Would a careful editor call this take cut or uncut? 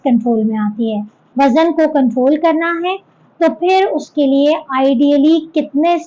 cut